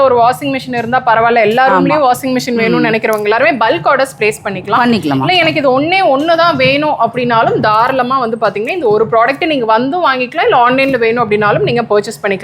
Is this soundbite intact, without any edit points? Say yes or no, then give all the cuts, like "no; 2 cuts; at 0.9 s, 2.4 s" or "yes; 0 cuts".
yes; 0 cuts